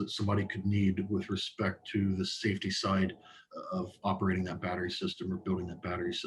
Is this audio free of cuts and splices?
yes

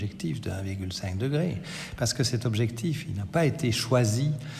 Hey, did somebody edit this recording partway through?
no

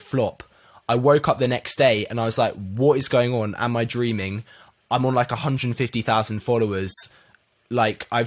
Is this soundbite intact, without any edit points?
yes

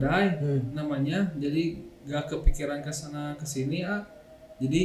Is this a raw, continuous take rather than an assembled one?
yes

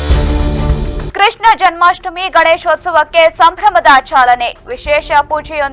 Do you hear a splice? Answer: no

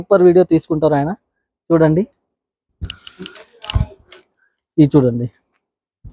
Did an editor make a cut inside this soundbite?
no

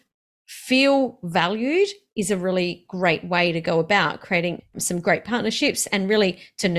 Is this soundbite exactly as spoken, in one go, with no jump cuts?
yes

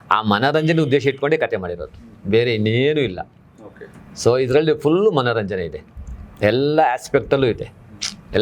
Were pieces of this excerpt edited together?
no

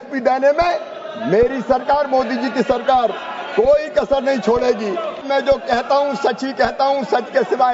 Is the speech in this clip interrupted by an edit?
yes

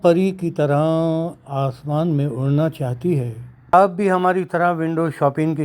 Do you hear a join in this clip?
yes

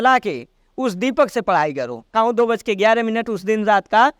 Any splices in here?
yes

